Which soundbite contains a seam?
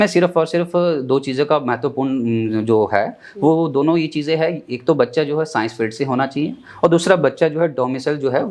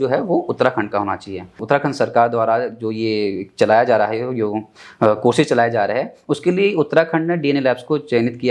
second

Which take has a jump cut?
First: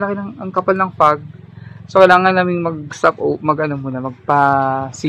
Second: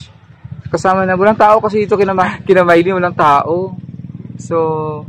second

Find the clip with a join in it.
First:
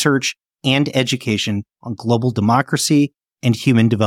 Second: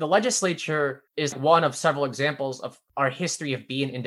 second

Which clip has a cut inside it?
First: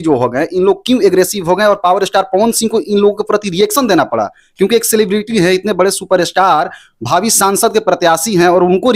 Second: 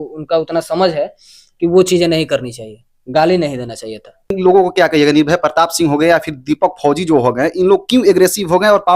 second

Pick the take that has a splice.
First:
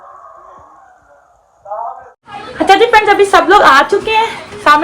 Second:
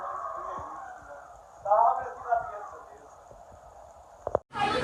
first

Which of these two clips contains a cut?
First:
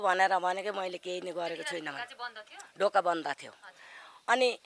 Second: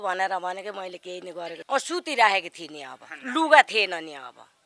second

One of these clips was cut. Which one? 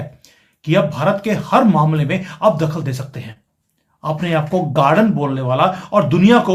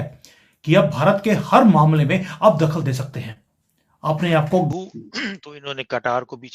second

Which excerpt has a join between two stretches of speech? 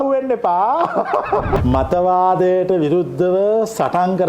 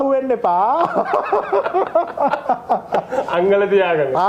first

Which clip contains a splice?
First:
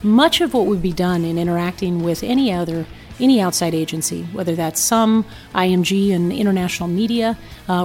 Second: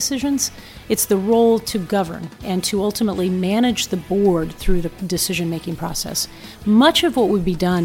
first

